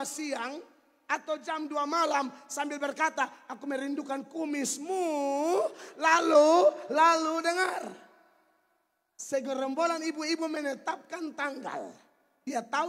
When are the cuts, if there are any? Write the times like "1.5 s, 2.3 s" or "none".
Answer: none